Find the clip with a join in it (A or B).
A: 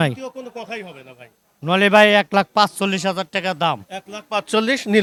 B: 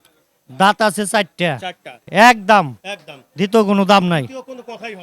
B